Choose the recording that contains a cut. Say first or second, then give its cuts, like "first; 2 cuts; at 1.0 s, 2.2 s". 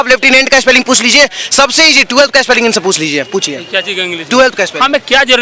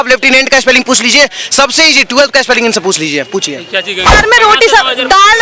second; 1 cut; at 4.1 s